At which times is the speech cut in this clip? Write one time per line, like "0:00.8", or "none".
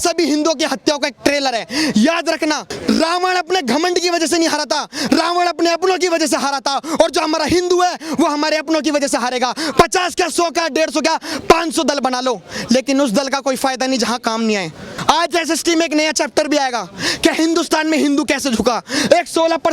0:02.7
0:14.9